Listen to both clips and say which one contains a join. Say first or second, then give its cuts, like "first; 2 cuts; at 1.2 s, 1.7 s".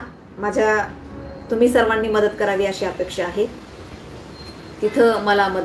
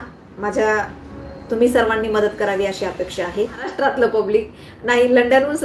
second; 1 cut; at 3.7 s